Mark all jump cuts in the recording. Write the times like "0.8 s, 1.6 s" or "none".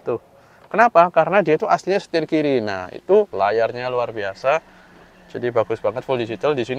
3.3 s